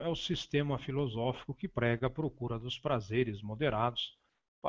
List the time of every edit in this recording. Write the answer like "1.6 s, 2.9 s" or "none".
3.1 s